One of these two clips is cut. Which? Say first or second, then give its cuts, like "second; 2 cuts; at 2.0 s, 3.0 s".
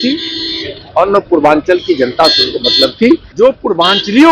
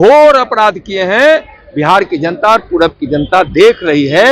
first; 1 cut; at 3.3 s